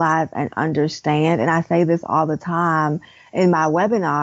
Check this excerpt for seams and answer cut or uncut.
uncut